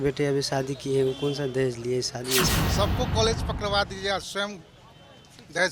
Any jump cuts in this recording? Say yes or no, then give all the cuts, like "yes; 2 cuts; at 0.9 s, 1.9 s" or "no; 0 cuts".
yes; 1 cut; at 2.6 s